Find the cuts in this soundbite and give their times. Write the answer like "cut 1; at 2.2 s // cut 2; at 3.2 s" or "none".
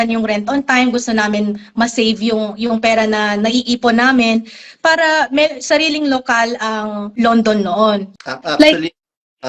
cut 1; at 7.1 s // cut 2; at 8.1 s